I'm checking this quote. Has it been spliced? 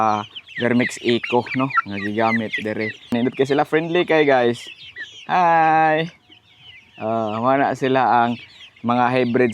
yes; 1 cut; at 3.1 s

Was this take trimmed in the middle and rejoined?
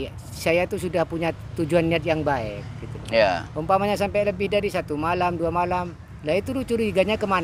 no; 0 cuts

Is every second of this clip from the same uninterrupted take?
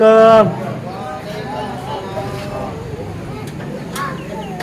yes; 0 cuts

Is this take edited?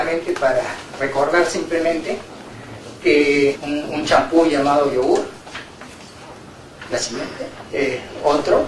no; 0 cuts

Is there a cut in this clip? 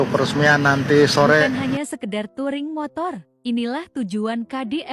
yes; 1 cut; at 2.2 s

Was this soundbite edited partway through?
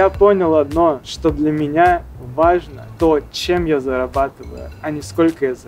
yes; 2 cuts; at 1.1 s, 2.8 s

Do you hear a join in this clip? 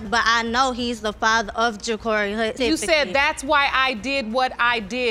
no; 0 cuts

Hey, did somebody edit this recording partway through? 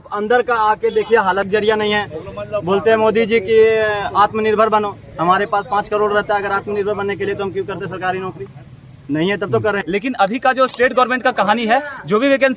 yes; 2 cuts; at 1.5 s, 9.8 s

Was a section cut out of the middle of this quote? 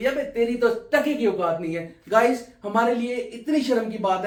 no; 0 cuts

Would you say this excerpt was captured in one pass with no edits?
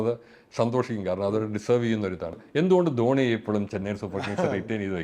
no; 1 cut; at 2.4 s

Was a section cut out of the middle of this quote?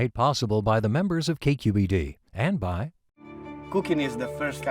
no; 0 cuts

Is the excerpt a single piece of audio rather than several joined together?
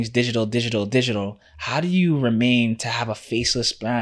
yes; 0 cuts

